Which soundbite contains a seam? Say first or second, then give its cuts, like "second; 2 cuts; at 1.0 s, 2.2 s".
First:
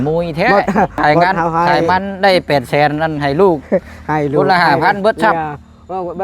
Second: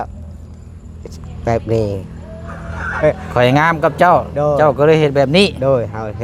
first; 1 cut; at 1.9 s